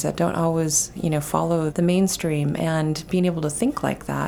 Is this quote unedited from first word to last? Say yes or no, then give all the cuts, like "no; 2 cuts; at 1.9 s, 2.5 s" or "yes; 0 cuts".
no; 1 cut; at 1.7 s